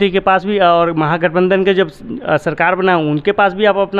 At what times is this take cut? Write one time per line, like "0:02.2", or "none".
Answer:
none

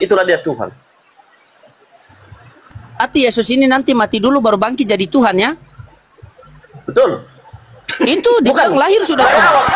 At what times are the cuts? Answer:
none

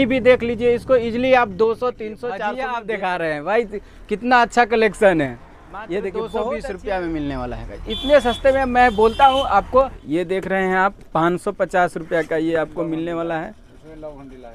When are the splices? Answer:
0:02.4
0:06.7
0:10.0

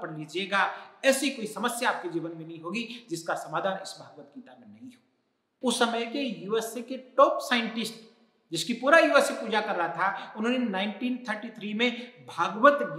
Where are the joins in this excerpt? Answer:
0:05.5

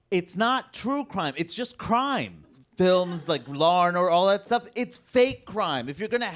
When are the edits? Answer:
0:02.6

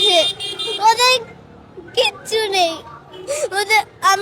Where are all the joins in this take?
none

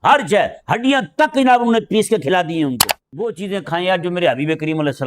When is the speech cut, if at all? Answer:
0:03.4

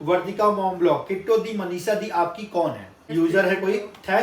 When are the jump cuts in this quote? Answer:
0:02.9

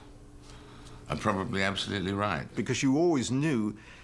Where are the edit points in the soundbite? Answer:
0:02.5

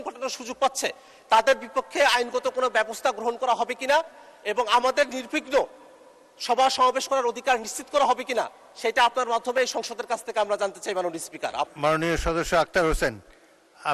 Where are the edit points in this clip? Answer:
0:11.7

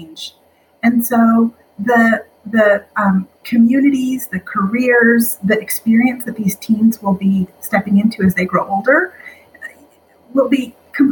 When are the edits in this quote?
none

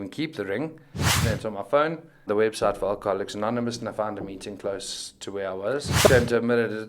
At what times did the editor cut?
0:01.2
0:02.3
0:06.1

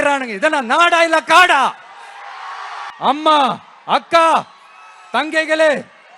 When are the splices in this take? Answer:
0:02.8

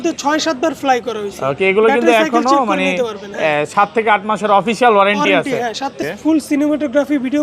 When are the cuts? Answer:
0:06.1

